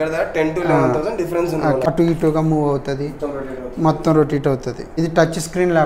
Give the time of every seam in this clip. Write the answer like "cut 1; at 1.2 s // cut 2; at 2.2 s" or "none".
cut 1; at 1.9 s // cut 2; at 4.9 s